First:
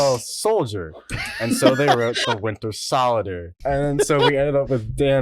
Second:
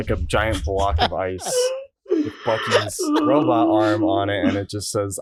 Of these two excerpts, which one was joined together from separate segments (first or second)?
first